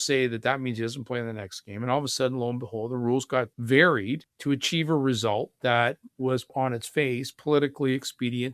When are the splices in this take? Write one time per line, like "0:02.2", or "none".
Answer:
0:03.6
0:04.3
0:06.5